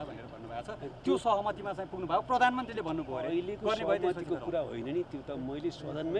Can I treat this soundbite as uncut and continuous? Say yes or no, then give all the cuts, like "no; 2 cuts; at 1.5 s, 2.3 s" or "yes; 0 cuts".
yes; 0 cuts